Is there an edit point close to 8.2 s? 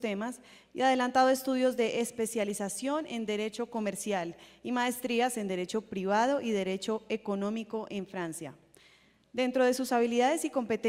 no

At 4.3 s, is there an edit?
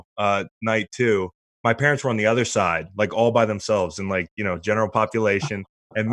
no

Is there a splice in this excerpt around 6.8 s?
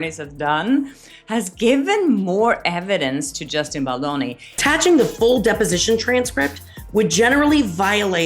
no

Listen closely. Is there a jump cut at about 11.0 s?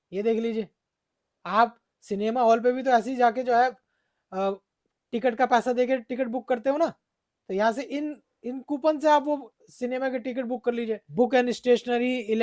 yes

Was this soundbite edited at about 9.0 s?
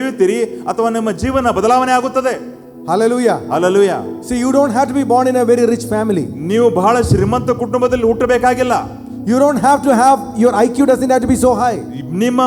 no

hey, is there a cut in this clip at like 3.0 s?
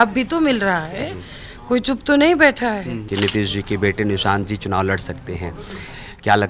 yes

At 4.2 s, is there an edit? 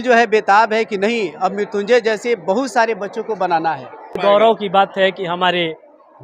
yes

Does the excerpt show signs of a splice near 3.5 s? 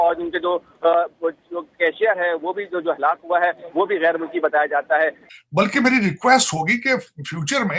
no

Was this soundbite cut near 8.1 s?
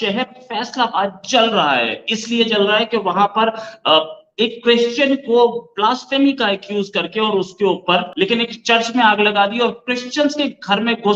yes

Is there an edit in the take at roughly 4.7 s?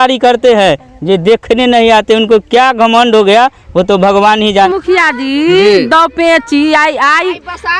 yes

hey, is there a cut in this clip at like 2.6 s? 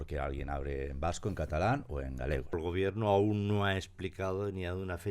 yes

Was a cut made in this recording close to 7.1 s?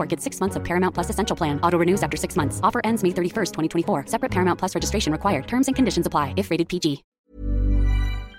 yes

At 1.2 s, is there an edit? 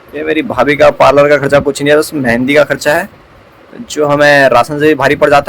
no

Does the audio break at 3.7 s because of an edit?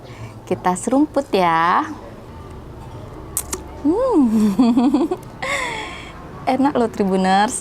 no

